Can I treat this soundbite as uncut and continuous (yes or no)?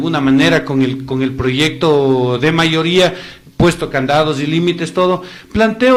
yes